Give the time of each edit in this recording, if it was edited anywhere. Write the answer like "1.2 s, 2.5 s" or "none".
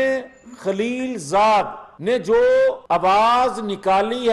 1.8 s, 2.8 s